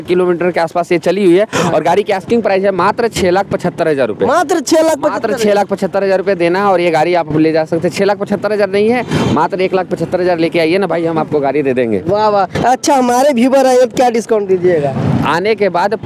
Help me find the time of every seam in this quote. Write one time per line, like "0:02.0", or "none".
none